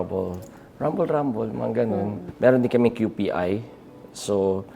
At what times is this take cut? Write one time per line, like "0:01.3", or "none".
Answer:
0:02.2